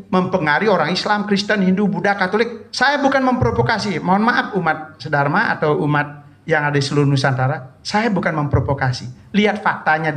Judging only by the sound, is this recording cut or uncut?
uncut